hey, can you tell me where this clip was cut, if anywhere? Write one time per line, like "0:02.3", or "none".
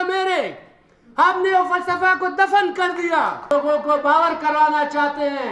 0:03.4